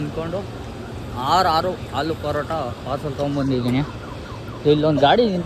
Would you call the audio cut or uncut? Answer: uncut